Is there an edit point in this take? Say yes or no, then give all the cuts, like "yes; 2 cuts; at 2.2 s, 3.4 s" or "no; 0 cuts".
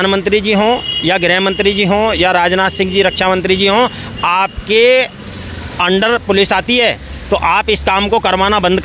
no; 0 cuts